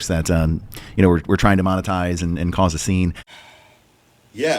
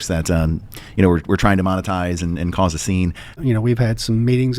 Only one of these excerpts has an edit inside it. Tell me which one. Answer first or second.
second